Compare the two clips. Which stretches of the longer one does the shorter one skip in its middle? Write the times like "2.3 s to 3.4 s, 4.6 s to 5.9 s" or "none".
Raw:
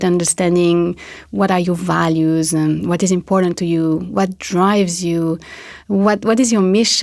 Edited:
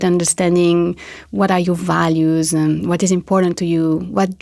none